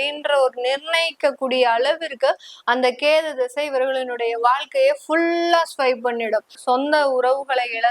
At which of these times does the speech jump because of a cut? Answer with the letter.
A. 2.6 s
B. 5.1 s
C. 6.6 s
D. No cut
C